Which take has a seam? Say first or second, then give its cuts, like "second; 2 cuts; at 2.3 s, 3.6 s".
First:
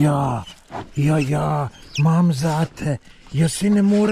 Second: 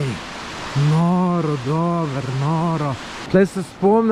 second; 1 cut; at 3.1 s